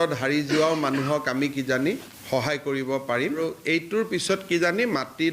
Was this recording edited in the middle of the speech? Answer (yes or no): yes